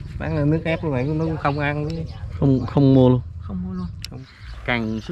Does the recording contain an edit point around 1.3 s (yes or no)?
no